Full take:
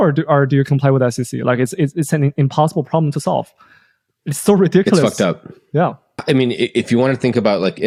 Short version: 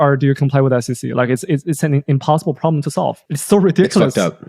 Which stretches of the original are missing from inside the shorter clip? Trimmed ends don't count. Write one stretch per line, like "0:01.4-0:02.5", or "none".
0:03.6-0:04.3